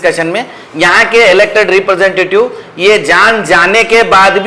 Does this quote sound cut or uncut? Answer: uncut